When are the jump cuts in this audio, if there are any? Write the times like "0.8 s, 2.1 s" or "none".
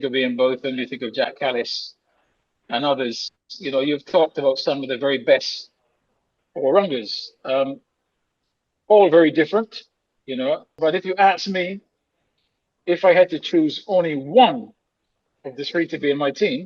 10.7 s